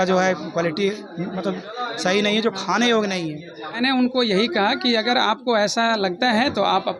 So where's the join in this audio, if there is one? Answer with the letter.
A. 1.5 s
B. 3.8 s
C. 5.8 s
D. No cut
B